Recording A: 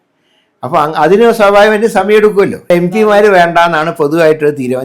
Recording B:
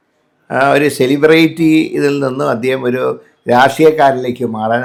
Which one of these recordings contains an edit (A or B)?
A